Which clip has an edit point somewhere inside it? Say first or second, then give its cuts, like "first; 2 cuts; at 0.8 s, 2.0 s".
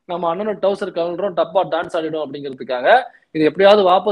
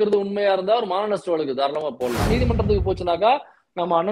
second; 1 cut; at 2.3 s